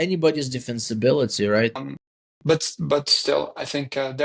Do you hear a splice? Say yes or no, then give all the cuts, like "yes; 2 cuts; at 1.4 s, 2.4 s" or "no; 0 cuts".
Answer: yes; 1 cut; at 1.8 s